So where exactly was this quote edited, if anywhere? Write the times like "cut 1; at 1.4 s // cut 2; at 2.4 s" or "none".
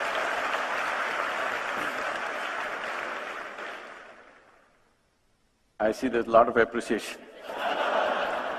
none